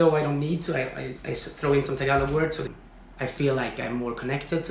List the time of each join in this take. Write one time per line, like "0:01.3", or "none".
0:02.7